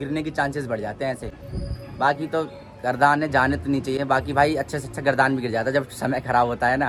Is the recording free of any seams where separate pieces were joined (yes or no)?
yes